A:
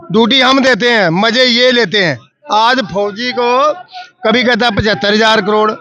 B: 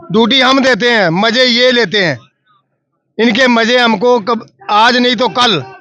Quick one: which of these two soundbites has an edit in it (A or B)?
A